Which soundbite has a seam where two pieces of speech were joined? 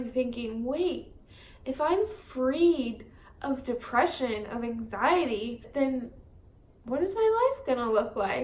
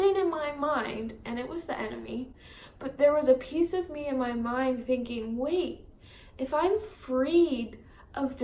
first; 1 cut; at 5.6 s

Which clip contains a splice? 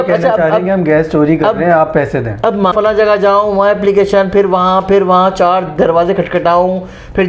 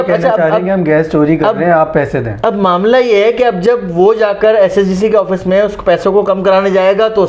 first; 1 cut; at 2.7 s

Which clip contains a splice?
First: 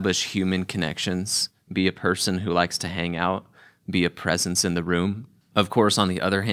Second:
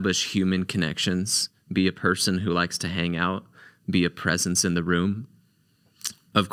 first; 1 cut; at 5.3 s

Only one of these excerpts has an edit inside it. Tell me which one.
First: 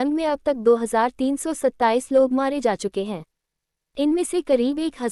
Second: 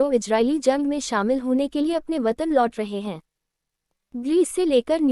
second; 1 cut; at 3.9 s

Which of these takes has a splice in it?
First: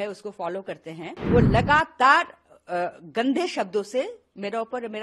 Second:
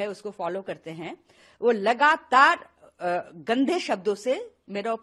first; 1 cut; at 1.1 s

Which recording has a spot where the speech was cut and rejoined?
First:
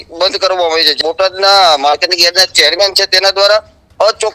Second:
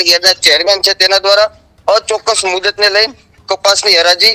first; 1 cut; at 1.0 s

